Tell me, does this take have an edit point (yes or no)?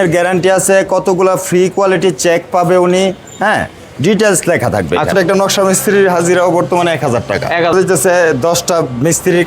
yes